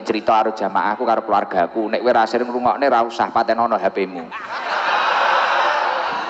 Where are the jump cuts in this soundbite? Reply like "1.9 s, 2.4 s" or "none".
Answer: 3.1 s